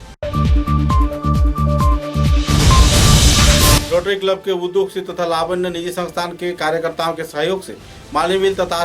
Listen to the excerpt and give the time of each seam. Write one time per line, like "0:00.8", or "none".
0:03.8